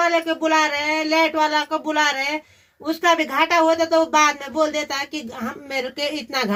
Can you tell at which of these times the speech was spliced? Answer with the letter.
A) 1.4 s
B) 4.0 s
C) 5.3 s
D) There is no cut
D